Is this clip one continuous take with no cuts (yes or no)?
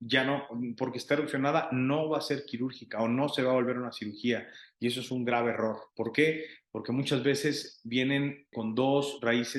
no